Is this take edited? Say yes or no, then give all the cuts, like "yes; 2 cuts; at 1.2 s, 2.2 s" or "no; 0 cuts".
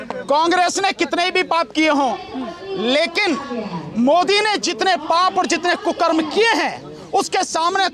no; 0 cuts